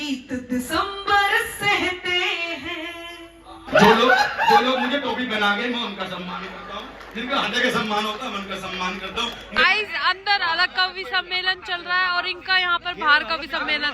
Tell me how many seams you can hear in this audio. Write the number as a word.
two